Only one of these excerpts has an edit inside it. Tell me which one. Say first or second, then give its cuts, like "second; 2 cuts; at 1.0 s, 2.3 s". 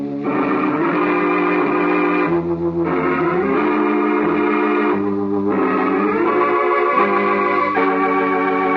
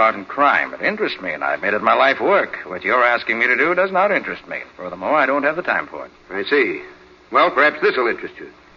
second; 1 cut; at 6.3 s